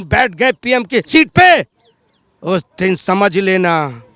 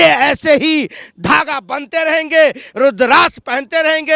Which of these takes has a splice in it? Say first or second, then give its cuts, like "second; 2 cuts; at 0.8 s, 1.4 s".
first; 1 cut; at 1.1 s